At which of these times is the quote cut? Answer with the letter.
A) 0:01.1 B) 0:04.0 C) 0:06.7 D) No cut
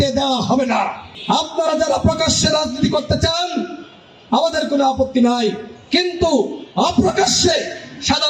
A